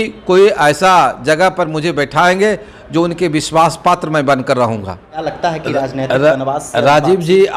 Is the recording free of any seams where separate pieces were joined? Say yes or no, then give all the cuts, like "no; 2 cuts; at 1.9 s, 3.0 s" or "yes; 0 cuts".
no; 1 cut; at 5.3 s